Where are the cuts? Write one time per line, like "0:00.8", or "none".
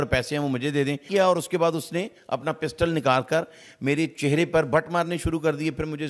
0:01.0